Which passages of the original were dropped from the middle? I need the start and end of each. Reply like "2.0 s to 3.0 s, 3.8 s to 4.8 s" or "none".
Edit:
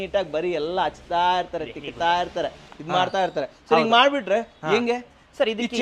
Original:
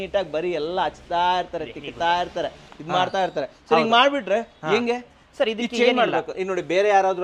none